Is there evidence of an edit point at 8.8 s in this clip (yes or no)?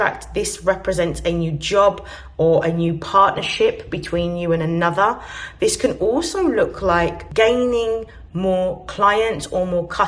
no